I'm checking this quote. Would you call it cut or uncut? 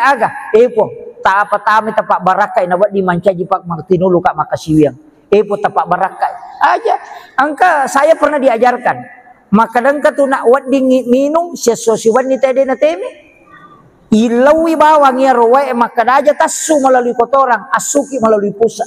uncut